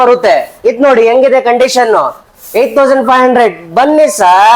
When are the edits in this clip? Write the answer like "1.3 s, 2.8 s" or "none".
none